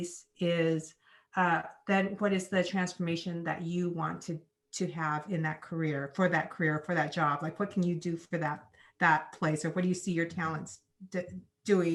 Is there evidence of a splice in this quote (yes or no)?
no